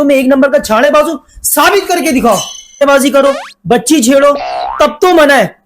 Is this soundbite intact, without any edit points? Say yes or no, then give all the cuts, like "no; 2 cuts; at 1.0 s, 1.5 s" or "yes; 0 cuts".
no; 1 cut; at 2.8 s